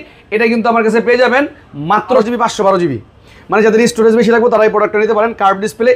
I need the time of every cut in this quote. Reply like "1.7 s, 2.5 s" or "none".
2.2 s